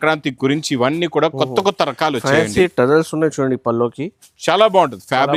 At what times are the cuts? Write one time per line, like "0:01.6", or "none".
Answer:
none